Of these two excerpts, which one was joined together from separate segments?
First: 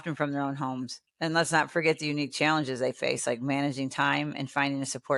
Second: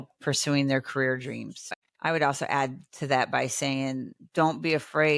second; 1 cut; at 1.5 s

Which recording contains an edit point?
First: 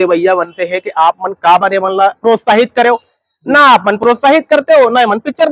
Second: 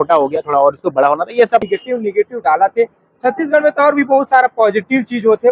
second; 1 cut; at 1.7 s

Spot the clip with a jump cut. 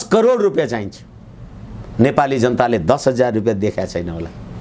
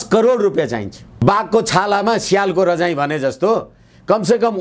second; 1 cut; at 1.2 s

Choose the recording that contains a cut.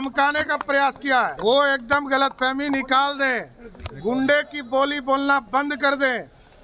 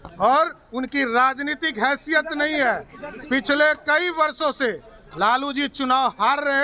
first; 1 cut; at 1.3 s

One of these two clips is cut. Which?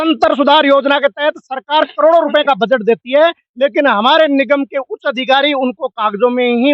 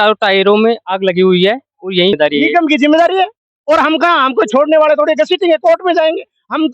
second; 1 cut; at 2.2 s

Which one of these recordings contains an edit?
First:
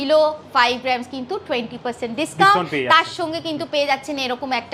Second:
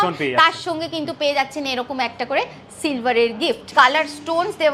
second; 1 cut; at 3.6 s

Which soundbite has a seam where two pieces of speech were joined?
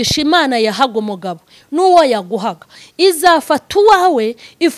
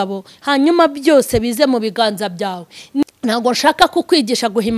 second; 1 cut; at 3.0 s

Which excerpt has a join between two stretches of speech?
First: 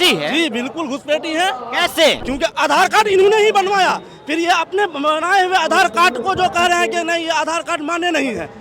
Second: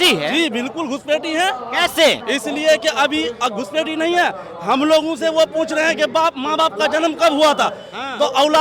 first; 1 cut; at 2.2 s

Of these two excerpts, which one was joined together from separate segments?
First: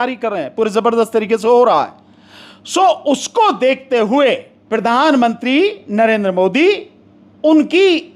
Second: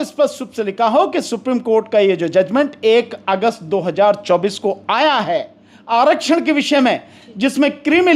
first; 1 cut; at 4.5 s

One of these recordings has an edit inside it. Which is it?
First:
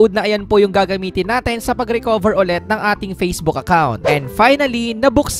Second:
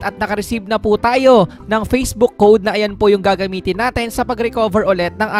first; 1 cut; at 4.0 s

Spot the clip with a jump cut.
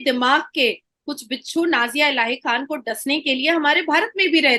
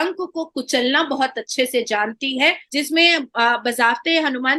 second; 1 cut; at 2.6 s

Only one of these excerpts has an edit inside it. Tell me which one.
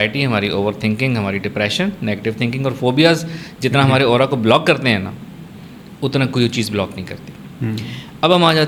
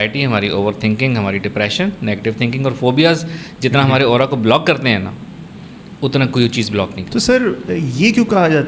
second; 1 cut; at 7.0 s

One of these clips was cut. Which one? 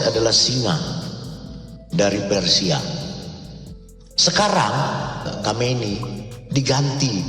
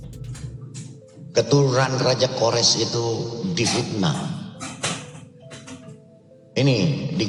first; 1 cut; at 5.2 s

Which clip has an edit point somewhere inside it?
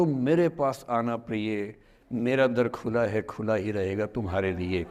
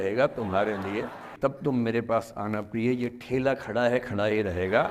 second; 1 cut; at 1.3 s

